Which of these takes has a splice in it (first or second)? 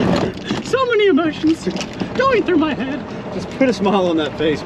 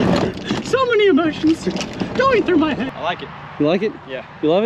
second